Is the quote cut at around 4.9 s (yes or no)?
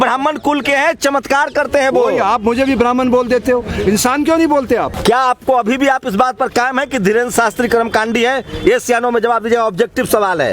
yes